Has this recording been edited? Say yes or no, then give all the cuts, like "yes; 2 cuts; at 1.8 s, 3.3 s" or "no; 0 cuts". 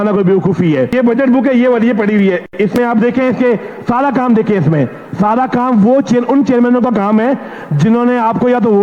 yes; 1 cut; at 0.9 s